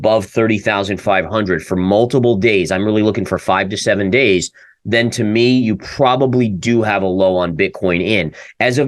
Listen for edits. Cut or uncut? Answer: uncut